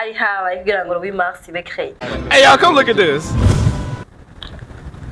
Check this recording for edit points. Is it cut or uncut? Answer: uncut